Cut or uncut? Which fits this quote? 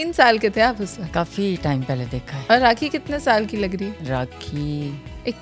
cut